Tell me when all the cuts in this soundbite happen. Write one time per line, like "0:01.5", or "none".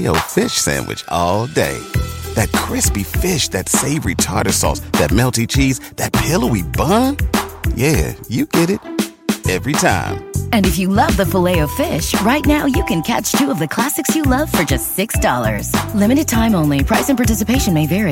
none